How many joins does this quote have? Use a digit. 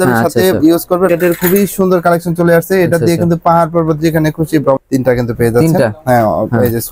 2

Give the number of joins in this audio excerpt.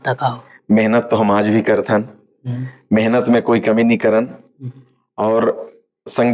0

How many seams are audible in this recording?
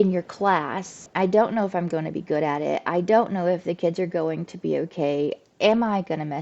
1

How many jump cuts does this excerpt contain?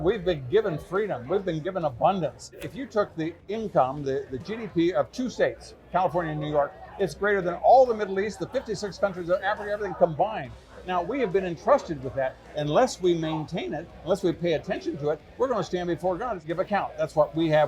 3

